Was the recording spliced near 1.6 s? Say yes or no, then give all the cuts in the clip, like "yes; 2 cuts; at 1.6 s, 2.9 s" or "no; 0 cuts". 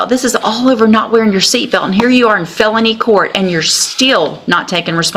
no; 0 cuts